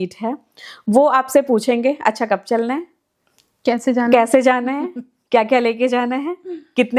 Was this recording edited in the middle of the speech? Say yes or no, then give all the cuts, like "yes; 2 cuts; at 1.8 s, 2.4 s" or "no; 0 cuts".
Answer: no; 0 cuts